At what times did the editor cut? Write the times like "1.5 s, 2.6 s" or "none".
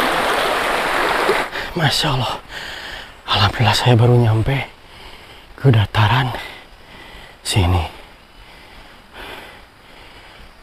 1.4 s